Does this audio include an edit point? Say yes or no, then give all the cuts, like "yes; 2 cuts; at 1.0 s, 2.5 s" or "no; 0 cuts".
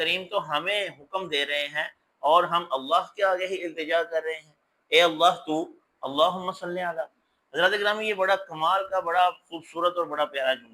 no; 0 cuts